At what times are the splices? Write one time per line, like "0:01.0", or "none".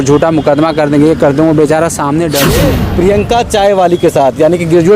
0:02.8